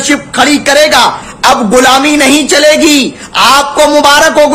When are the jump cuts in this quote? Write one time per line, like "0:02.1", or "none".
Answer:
none